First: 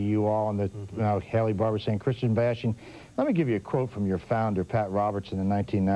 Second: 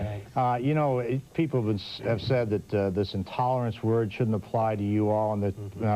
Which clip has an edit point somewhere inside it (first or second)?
second